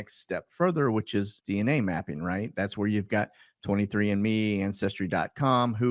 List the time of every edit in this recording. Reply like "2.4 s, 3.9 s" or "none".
1.4 s